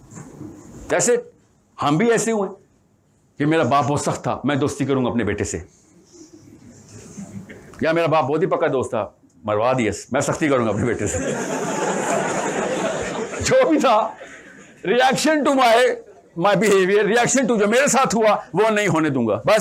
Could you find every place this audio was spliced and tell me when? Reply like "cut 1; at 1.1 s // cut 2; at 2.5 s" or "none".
none